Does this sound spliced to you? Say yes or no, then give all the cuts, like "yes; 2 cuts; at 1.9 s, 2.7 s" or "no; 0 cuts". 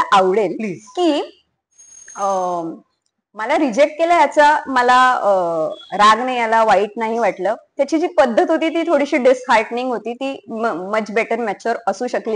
no; 0 cuts